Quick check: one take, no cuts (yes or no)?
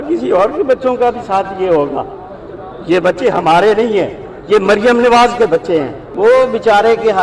no